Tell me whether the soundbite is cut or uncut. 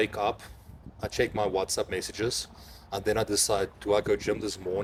uncut